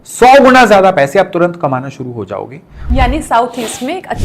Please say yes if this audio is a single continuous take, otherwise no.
no